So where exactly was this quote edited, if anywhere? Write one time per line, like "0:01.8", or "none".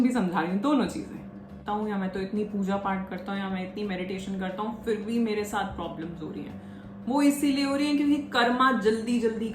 0:01.6